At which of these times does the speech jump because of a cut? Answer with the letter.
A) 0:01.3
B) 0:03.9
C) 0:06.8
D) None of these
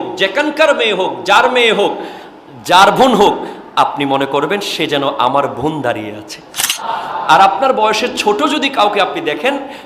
C